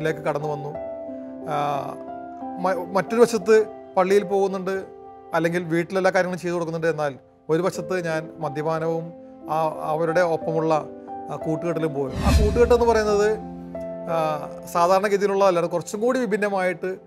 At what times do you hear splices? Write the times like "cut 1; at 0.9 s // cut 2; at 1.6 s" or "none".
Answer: none